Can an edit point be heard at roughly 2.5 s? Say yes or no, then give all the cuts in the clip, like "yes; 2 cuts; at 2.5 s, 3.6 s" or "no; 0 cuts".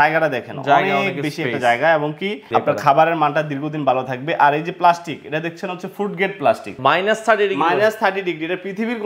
yes; 2 cuts; at 2.5 s, 6.7 s